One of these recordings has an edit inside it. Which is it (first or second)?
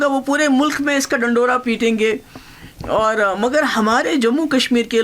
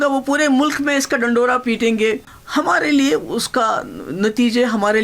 second